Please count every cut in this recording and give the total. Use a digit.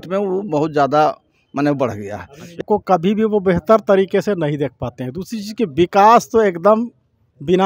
1